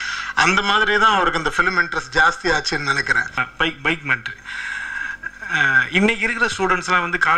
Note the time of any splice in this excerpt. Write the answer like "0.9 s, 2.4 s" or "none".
3.5 s